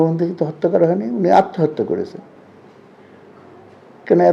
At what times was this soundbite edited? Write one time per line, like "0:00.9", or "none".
none